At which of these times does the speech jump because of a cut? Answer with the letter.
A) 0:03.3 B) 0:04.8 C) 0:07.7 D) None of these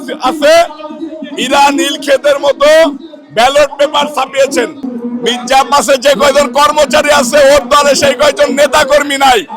B